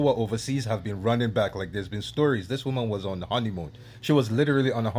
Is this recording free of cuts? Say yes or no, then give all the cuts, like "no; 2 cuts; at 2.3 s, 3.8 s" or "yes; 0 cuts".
yes; 0 cuts